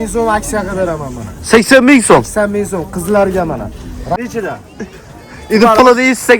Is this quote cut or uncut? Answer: cut